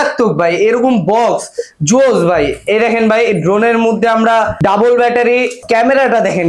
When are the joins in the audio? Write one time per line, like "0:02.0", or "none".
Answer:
0:04.5
0:05.6